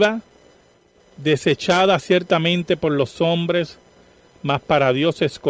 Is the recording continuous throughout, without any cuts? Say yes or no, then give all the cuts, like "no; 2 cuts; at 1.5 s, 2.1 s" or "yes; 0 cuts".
yes; 0 cuts